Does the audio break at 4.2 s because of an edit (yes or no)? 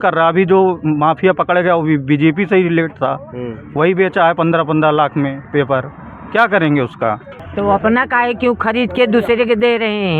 no